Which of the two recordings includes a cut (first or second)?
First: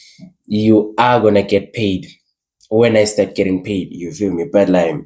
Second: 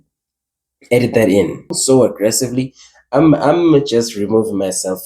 second